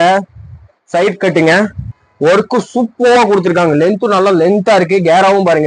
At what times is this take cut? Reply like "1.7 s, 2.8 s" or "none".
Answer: 2.0 s